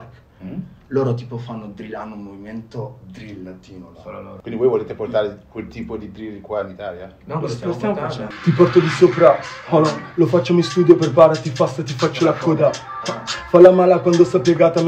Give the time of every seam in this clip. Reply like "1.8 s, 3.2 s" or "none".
4.4 s, 8.3 s

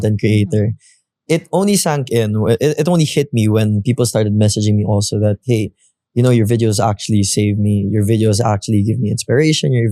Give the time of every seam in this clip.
none

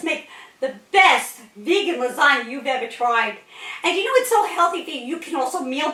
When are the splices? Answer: none

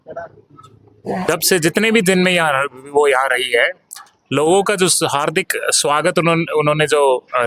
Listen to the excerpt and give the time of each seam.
1.3 s

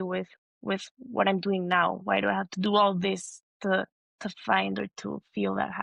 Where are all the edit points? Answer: 4.0 s

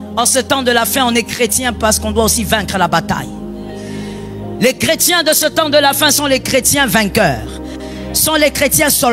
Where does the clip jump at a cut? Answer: none

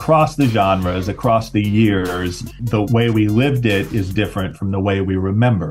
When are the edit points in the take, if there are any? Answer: 2.8 s

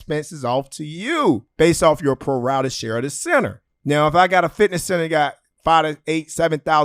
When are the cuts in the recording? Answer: 1.5 s, 3.7 s

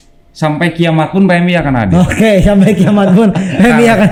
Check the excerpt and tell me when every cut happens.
none

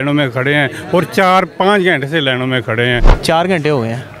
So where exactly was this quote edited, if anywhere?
3.1 s

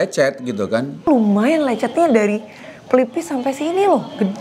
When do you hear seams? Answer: 1.1 s

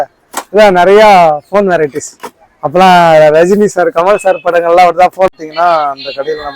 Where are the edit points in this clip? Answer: 5.4 s

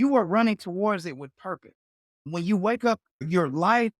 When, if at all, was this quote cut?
2.2 s

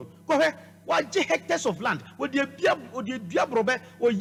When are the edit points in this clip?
none

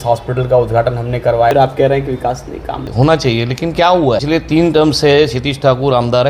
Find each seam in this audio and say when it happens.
1.5 s, 2.9 s, 4.2 s

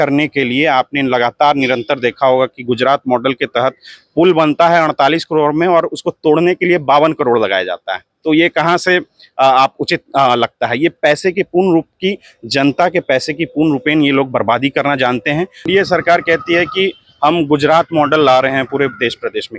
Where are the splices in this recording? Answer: 15.7 s

